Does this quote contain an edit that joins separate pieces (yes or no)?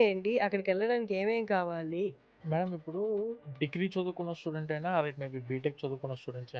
yes